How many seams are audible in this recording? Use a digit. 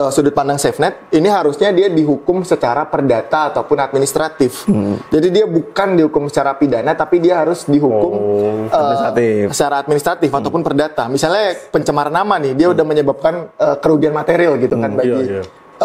0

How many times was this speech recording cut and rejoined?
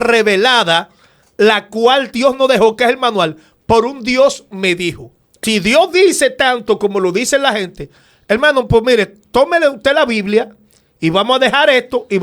1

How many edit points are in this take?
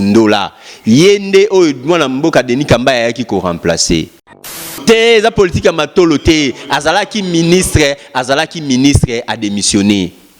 1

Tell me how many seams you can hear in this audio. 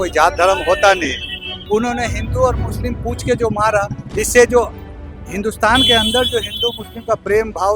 1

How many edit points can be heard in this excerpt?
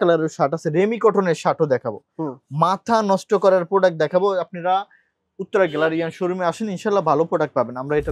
0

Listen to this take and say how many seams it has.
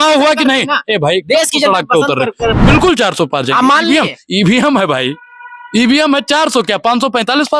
1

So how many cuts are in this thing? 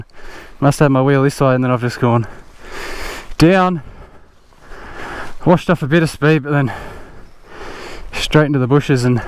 0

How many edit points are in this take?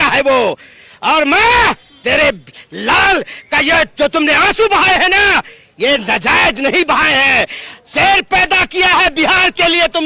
0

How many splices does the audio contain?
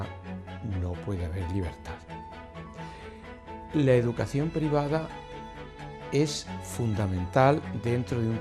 0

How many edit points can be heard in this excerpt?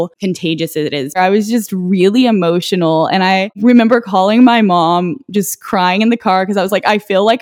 2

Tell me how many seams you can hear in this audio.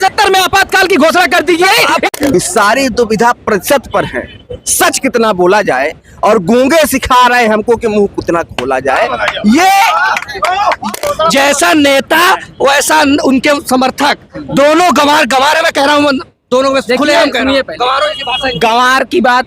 2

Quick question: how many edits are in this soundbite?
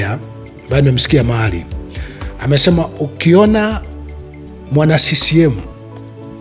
0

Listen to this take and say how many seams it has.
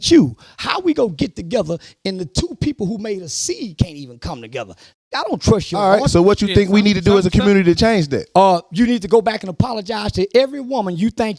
0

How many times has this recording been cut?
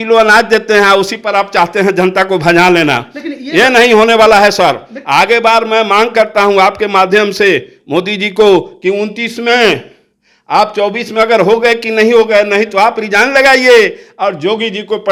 0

